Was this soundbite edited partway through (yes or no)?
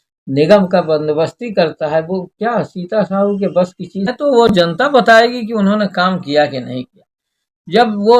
yes